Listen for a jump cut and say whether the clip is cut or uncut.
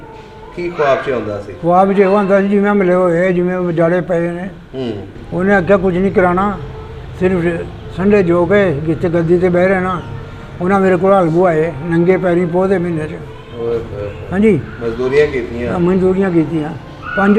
cut